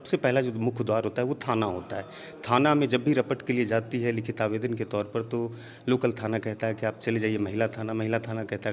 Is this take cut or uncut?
uncut